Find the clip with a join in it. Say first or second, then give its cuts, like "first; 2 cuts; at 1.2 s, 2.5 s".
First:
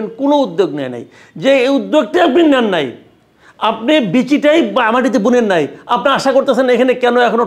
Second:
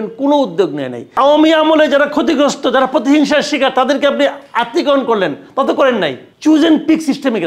second; 2 cuts; at 1.1 s, 6.3 s